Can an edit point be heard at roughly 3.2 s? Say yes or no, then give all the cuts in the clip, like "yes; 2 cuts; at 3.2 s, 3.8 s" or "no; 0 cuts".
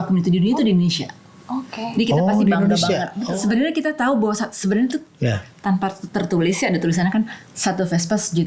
yes; 1 cut; at 3.2 s